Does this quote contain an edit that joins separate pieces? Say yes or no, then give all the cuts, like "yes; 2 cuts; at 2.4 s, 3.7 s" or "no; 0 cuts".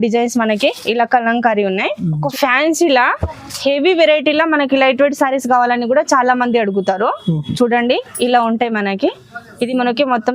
yes; 1 cut; at 2.2 s